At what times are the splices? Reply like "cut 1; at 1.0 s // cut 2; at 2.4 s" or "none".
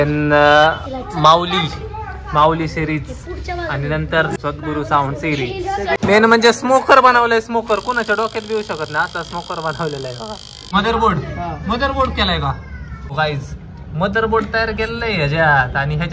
cut 1; at 4.3 s // cut 2; at 6.0 s // cut 3; at 10.7 s // cut 4; at 13.1 s